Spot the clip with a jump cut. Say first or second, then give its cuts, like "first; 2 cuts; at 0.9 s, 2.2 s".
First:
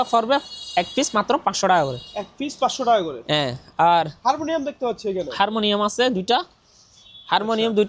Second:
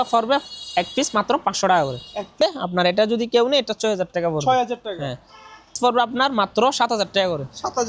second; 2 cuts; at 2.4 s, 5.8 s